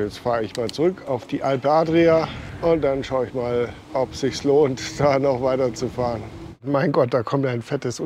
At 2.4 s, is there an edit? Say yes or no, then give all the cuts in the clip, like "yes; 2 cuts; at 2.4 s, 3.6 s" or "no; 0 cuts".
yes; 3 cuts; at 2.4 s, 3.8 s, 6.6 s